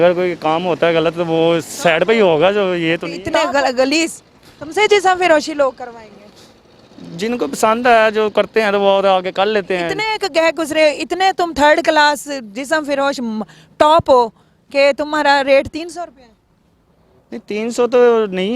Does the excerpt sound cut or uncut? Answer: cut